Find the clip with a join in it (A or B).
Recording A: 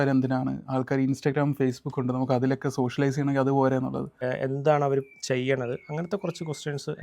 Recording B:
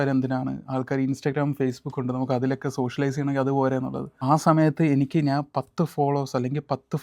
A